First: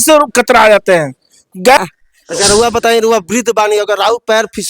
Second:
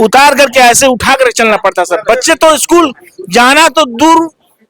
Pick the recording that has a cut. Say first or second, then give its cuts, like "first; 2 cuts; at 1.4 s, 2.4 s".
first; 1 cut; at 1.8 s